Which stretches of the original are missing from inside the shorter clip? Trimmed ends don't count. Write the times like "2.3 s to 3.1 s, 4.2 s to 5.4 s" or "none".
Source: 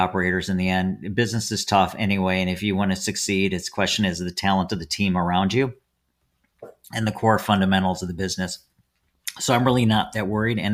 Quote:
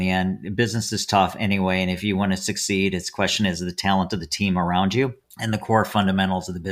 5.9 s to 6.8 s